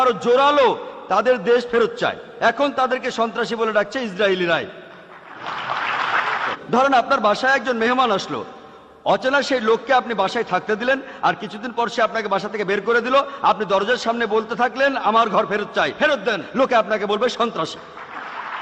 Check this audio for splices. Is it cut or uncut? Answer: cut